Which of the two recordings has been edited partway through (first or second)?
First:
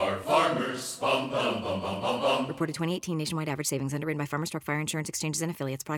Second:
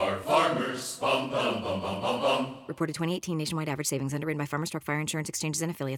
first